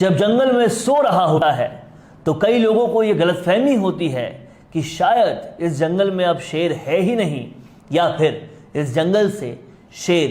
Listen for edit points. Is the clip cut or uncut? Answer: cut